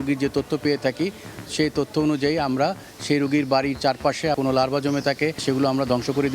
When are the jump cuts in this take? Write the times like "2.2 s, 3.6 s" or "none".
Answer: 4.4 s, 5.4 s

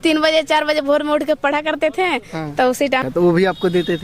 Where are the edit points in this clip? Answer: 3.0 s

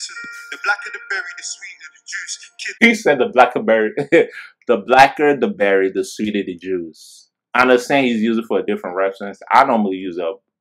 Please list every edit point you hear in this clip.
2.8 s

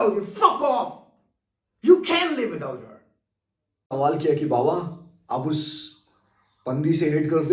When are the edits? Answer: 3.9 s

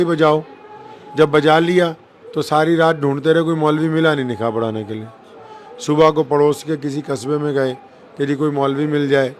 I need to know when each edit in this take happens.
none

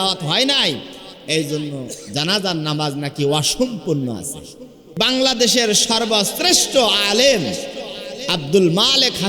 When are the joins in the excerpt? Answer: 5.0 s

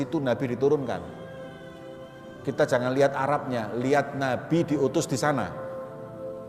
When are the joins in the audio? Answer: 5.5 s

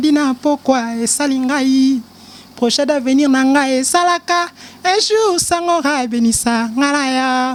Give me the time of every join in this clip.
none

